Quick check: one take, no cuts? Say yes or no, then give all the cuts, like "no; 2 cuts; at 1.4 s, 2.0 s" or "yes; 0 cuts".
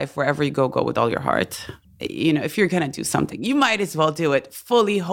no; 1 cut; at 1.8 s